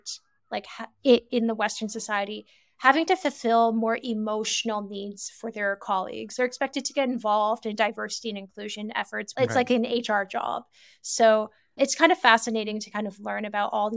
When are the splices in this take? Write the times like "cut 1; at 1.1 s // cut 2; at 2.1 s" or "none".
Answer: cut 1; at 6.3 s // cut 2; at 9.2 s